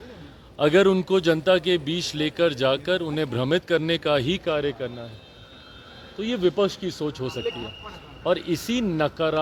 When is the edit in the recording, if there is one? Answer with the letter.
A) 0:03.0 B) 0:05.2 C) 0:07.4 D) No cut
D